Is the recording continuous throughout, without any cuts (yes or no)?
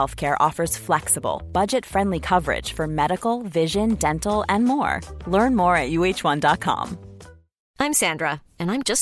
yes